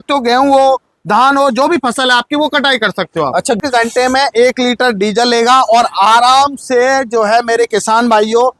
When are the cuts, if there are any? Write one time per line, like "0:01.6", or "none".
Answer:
0:03.6